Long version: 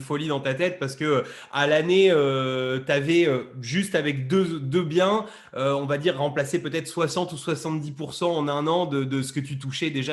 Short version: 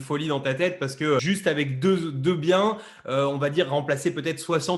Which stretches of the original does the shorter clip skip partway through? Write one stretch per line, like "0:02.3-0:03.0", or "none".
0:01.2-0:03.7